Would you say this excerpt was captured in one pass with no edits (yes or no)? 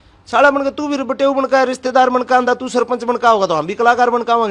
yes